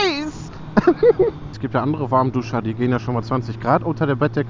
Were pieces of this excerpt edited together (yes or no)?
yes